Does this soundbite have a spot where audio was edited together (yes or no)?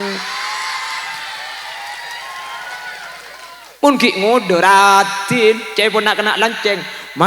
yes